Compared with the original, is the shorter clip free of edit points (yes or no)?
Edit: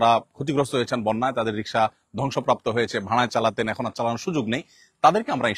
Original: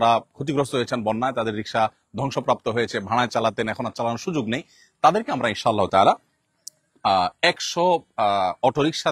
yes